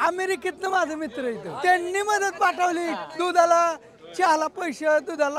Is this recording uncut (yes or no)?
no